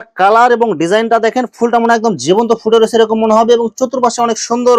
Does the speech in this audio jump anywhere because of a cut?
no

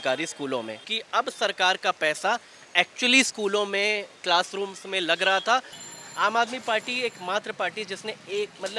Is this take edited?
yes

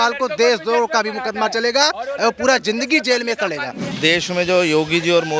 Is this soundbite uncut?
no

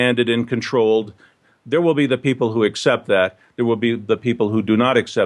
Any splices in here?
yes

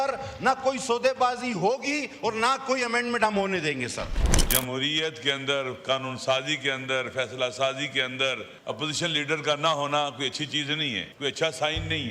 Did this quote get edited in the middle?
yes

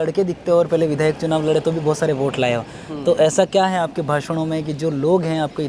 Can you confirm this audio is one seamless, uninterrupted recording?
yes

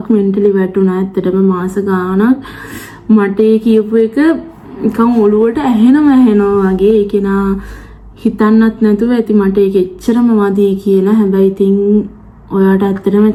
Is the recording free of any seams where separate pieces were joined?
yes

